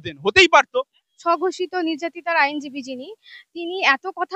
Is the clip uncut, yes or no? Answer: no